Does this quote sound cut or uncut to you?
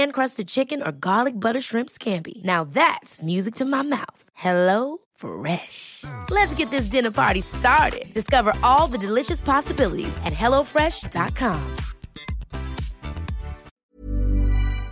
cut